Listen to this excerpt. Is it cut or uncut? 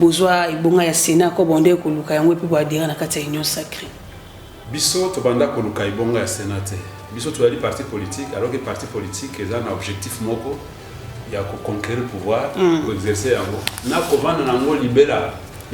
uncut